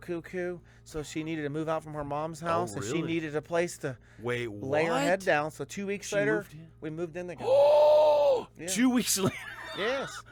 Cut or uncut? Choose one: uncut